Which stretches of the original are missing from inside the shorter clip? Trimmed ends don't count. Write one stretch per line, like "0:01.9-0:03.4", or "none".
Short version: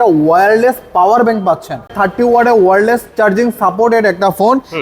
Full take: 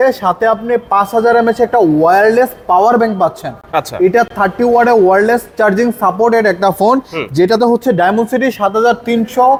0:03.6-0:04.3